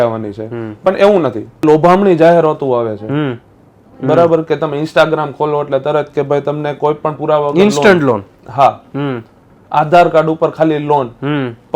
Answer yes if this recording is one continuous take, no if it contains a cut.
no